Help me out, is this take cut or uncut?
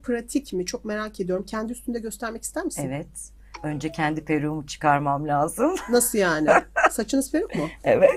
uncut